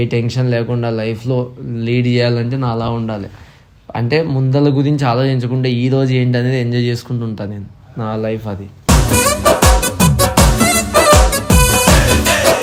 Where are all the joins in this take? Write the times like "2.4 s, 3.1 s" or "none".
none